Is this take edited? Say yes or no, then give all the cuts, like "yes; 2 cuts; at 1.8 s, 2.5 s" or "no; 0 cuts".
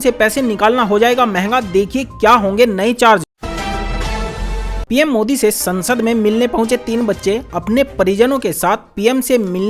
yes; 2 cuts; at 3.3 s, 4.8 s